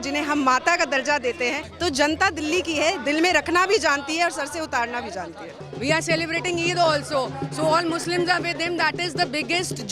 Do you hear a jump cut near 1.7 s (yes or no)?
yes